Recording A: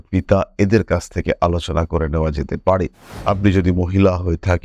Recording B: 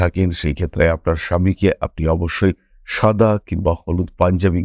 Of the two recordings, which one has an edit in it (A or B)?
A